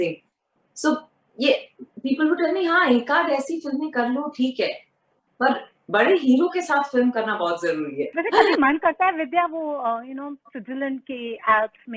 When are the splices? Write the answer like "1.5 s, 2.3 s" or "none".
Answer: 8.1 s